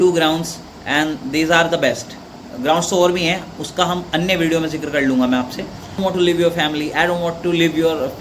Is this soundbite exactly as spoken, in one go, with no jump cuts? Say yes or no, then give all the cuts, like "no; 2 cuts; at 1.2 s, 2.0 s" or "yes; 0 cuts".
no; 1 cut; at 6.0 s